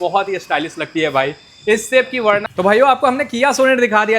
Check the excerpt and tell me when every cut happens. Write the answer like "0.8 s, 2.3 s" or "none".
2.5 s